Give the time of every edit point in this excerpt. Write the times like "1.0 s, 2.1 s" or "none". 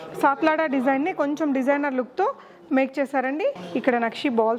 3.6 s